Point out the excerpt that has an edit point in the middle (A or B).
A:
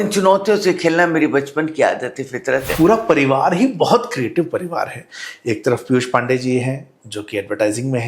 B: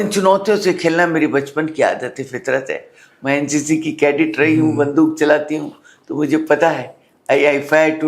A